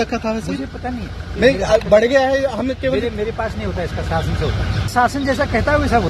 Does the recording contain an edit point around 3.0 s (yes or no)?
no